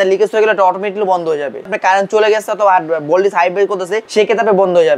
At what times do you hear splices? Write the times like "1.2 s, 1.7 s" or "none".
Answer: 1.7 s, 4.0 s